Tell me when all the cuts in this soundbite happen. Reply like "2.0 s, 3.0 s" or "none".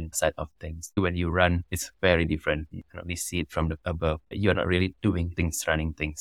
1.0 s, 2.7 s